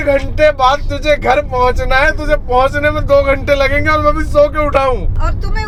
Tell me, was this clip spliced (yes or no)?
no